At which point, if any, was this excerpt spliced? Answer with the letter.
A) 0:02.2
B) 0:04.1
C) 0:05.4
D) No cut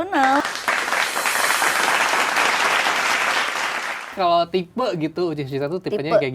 B